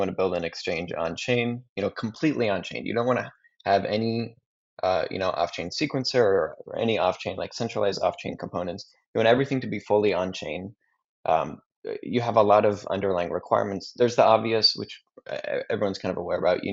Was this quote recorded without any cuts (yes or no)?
yes